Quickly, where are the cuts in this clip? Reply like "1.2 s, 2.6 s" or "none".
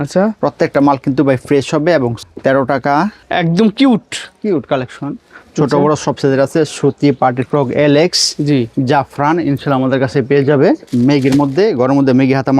2.2 s, 3.2 s, 10.8 s